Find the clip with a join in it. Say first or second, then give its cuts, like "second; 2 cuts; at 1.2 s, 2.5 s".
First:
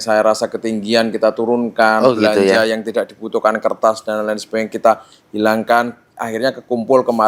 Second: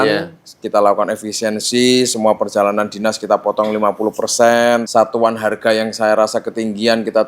second; 1 cut; at 4.9 s